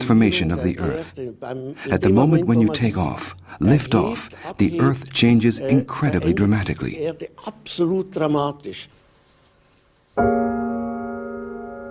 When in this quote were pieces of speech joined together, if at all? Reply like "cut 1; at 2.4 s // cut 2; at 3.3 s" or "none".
cut 1; at 6.1 s